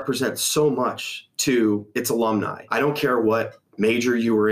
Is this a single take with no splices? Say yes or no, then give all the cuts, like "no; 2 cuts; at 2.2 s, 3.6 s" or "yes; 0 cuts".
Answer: no; 1 cut; at 2.6 s